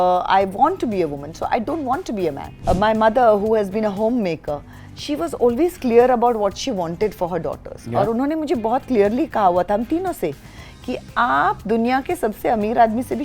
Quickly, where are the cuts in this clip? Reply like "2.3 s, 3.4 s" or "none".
2.6 s